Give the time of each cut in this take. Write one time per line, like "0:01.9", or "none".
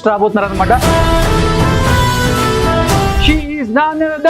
0:00.8
0:03.2